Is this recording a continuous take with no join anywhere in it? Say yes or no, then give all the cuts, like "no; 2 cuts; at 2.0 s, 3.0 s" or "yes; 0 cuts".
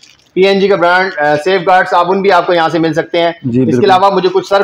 yes; 0 cuts